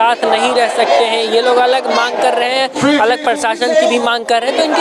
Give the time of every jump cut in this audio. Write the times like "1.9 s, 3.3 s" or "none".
none